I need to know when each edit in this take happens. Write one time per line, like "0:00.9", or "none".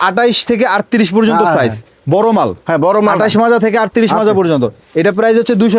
none

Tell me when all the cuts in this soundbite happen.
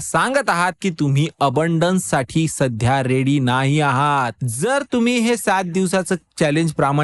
0:04.4

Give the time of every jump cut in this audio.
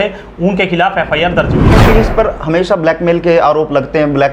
0:01.8

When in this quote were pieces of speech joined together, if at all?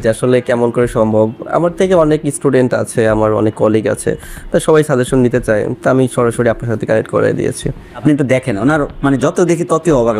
0:08.0

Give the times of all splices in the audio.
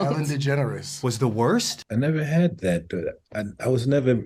0:01.7

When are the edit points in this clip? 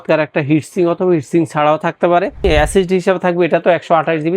0:02.4

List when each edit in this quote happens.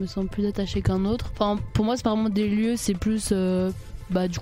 0:01.3

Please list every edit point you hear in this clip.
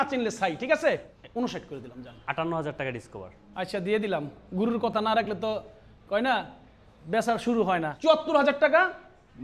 0:00.9
0:07.9

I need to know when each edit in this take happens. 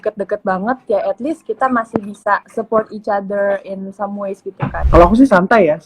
0:02.5
0:04.8

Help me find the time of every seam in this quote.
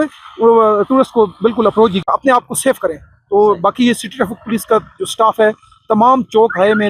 0:02.0

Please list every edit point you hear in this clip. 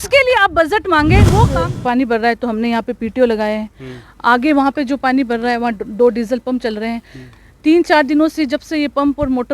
0:01.5

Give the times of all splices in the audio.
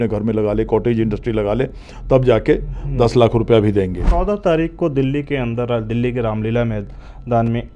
0:04.0

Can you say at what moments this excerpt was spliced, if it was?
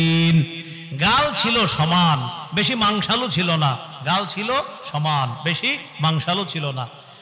none

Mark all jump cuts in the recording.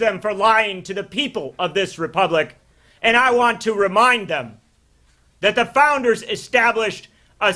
none

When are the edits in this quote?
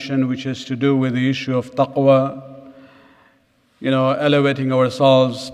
0:01.6

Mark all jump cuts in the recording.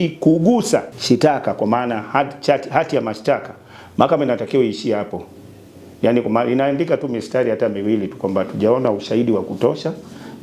0:00.9

